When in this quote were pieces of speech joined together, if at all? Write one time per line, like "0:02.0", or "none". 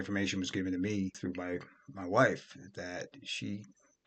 none